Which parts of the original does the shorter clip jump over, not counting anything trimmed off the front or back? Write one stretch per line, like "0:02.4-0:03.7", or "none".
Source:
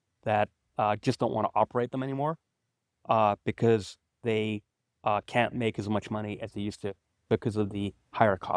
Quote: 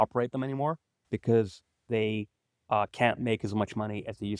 0:02.7-0:03.5